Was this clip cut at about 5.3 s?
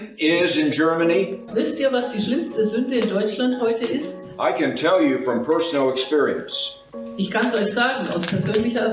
no; 1 cut; at 1.4 s

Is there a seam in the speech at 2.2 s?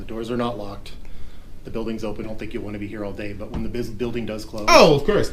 yes; 1 cut; at 2.2 s

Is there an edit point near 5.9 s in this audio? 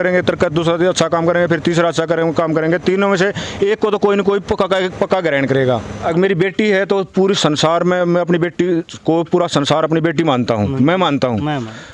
yes; 1 cut; at 5.9 s

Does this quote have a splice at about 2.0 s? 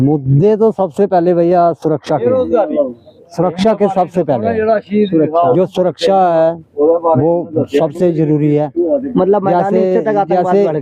no; 0 cuts

